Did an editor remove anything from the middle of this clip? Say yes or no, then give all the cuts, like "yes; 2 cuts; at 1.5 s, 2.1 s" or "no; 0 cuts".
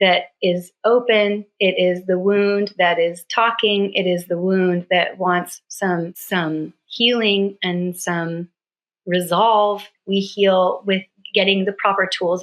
yes; 2 cuts; at 6.2 s, 9.9 s